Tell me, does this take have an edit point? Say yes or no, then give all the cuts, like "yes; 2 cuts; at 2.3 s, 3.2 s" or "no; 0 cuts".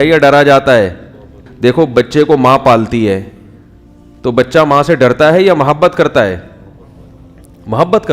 yes; 1 cut; at 1.4 s